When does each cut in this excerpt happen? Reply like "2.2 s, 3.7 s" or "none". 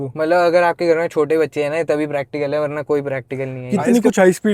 3.6 s